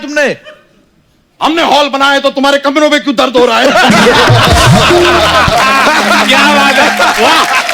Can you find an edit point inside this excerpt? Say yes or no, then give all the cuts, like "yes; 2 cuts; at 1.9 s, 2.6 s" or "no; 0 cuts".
no; 0 cuts